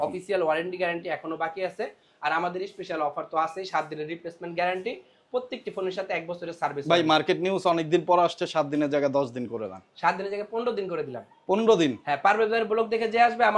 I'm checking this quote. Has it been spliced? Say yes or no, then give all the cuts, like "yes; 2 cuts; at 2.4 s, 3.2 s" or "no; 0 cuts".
no; 0 cuts